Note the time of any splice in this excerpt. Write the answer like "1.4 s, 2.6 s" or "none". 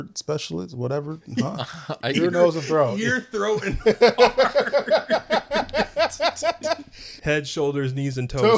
7.2 s